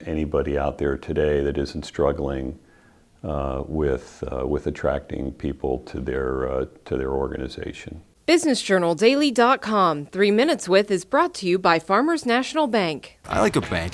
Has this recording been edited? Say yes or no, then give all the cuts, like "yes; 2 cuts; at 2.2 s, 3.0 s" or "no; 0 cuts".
yes; 1 cut; at 8.0 s